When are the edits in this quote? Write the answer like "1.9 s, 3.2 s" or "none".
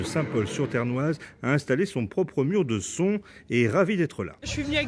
1.6 s